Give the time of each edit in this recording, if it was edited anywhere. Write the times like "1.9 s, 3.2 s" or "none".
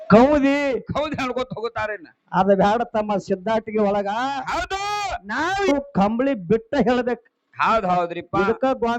5.7 s